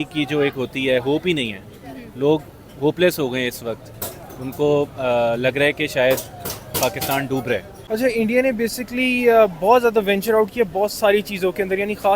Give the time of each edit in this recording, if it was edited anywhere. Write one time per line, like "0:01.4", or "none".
0:07.7